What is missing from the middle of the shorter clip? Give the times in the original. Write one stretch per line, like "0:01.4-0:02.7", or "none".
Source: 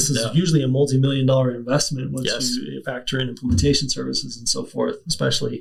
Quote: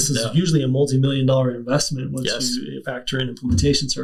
none